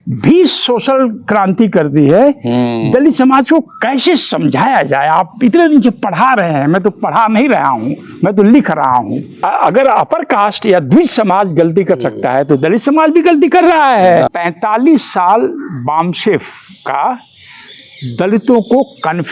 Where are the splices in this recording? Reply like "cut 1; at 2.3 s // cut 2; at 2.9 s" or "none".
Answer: cut 1; at 9.3 s // cut 2; at 14.3 s

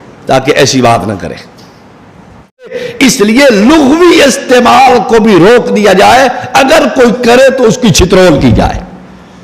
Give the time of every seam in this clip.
cut 1; at 2.7 s

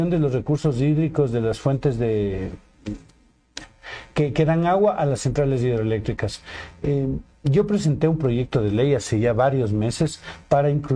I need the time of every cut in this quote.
none

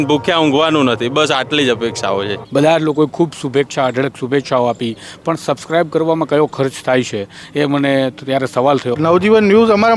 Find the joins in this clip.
cut 1; at 2.4 s // cut 2; at 8.9 s

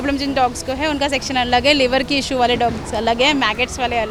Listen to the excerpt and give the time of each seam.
none

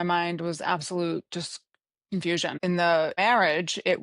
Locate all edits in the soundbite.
cut 1; at 2.6 s // cut 2; at 3.2 s

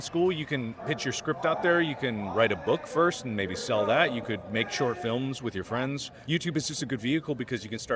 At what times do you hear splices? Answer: cut 1; at 0.8 s // cut 2; at 6.1 s

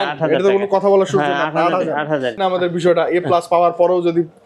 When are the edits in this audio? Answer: cut 1; at 2.4 s

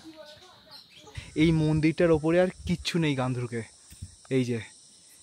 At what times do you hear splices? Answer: cut 1; at 1.2 s

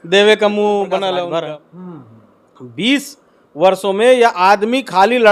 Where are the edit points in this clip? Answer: cut 1; at 1.3 s

